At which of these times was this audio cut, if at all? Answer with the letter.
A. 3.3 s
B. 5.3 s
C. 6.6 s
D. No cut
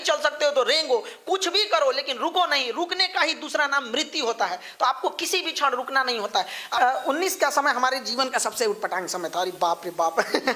C